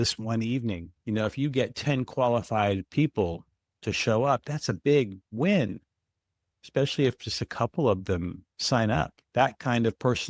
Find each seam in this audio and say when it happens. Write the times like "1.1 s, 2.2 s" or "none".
0.9 s, 9.2 s